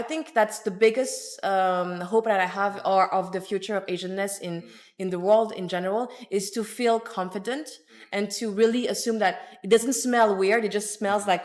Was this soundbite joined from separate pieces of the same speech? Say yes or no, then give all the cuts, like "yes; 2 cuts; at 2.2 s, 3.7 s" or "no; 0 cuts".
no; 0 cuts